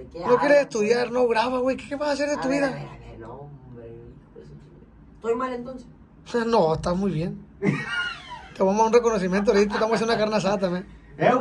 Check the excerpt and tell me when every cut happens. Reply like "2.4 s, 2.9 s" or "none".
none